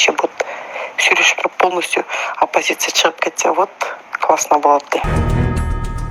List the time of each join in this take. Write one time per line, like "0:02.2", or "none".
0:05.1